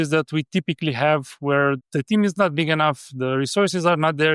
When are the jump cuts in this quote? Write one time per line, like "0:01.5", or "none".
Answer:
0:01.8